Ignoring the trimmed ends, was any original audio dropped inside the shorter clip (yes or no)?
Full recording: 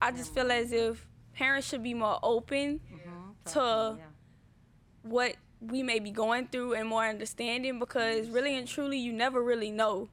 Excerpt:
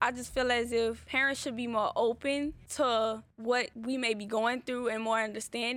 yes